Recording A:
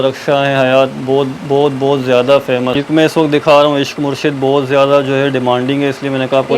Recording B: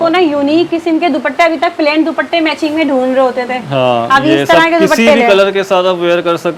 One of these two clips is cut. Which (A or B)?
A